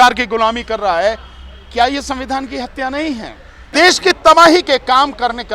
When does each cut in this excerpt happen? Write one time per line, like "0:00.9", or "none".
0:03.6

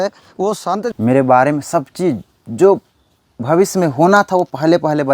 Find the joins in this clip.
0:00.9

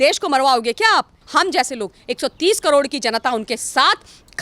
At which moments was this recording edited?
0:01.2

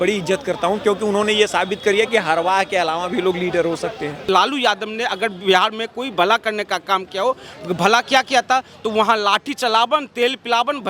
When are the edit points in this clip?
0:04.2

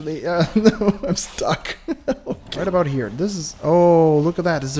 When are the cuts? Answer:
0:02.5

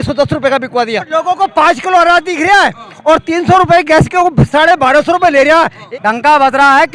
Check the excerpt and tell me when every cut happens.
0:01.1
0:05.8

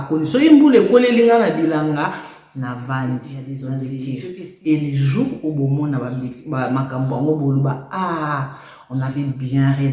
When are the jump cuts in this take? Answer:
0:03.9

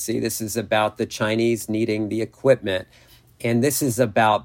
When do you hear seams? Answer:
none

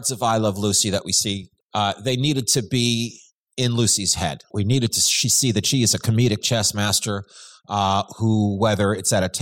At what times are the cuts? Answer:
0:01.5
0:04.5

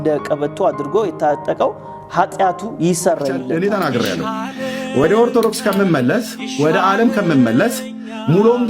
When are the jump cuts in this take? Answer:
0:03.4

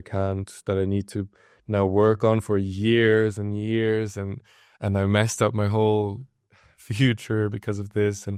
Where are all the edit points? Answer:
none

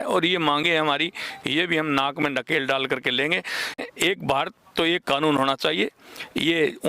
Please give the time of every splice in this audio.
0:03.8

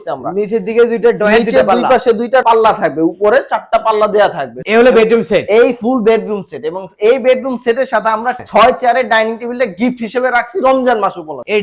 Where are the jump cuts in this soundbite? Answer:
none

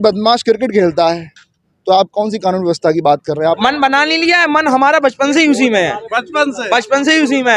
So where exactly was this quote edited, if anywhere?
0:03.6

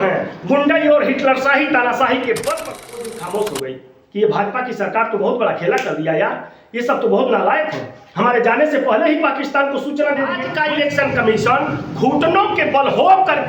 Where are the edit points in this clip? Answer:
0:03.1
0:10.5

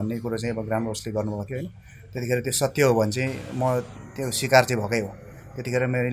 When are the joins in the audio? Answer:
none

